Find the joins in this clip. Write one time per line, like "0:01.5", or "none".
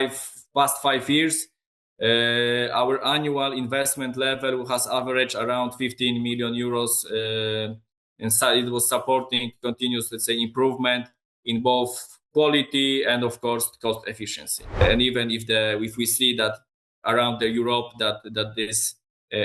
0:14.8